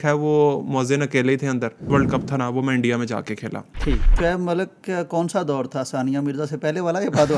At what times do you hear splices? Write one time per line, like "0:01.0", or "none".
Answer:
0:01.9
0:04.1